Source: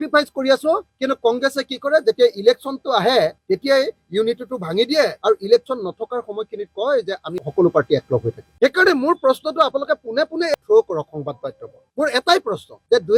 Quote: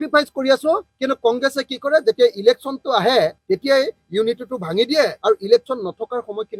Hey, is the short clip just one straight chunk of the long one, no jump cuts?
yes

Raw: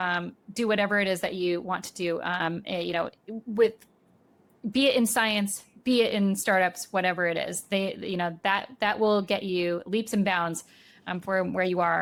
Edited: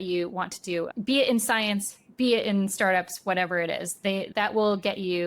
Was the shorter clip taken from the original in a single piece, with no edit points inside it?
no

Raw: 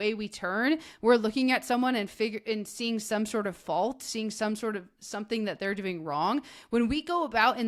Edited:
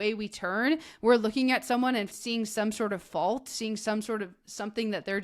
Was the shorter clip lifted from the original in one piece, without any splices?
no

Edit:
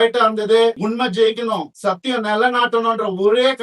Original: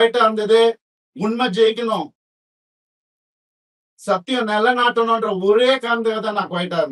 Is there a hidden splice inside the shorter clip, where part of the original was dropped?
yes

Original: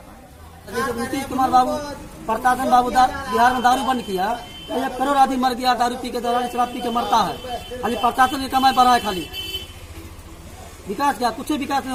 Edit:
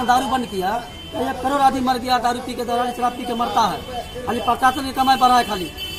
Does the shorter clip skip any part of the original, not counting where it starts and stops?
no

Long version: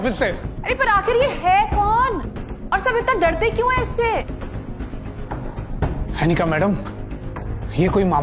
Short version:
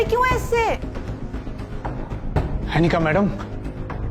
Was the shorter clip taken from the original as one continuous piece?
yes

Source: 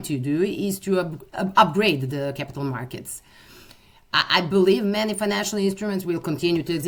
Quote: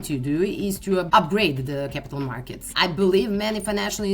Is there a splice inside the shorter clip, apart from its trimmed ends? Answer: yes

